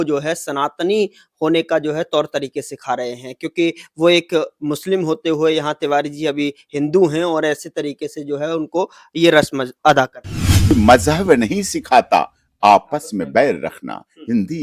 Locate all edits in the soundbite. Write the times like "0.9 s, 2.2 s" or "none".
10.7 s

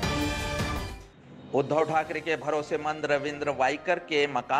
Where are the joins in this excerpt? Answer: 0.9 s

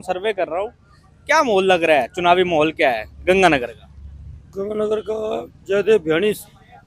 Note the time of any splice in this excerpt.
none

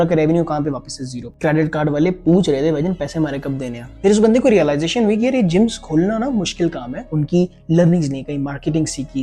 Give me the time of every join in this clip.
1.2 s, 3.9 s, 7.1 s

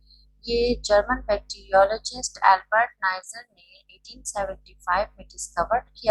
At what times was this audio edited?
none

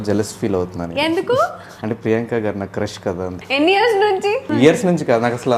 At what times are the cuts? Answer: 1.7 s, 3.4 s, 4.5 s

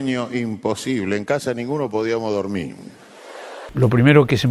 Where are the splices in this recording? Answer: 3.6 s

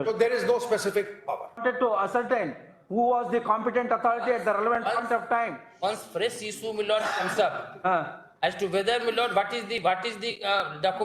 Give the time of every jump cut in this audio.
1.6 s

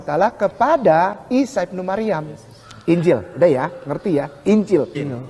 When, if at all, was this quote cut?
3.9 s

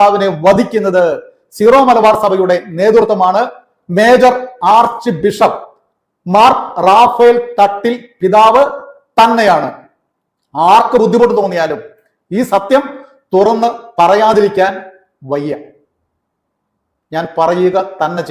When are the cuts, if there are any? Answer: none

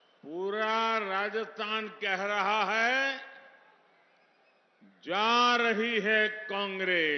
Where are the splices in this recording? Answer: none

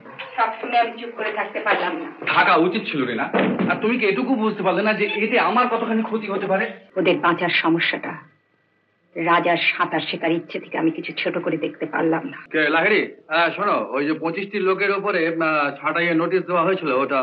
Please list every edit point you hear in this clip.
6.8 s, 12.4 s

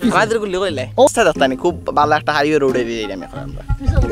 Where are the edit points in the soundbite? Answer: 1.1 s

